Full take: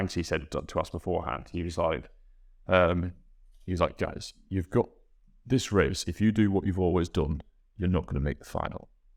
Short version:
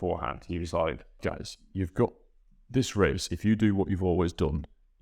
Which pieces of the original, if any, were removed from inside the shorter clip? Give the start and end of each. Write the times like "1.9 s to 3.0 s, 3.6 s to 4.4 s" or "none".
2.2 s to 3.9 s